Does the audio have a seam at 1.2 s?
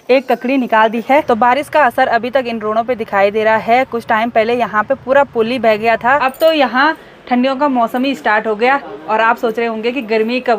yes; 2 cuts; at 1.2 s, 6.2 s

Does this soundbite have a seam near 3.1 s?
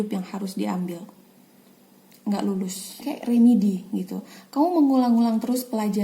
yes; 1 cut; at 3.1 s

